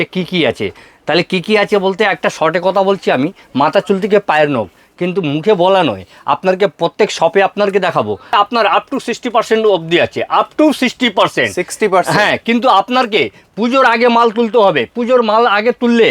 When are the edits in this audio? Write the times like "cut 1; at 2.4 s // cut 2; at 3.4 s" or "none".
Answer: cut 1; at 8.3 s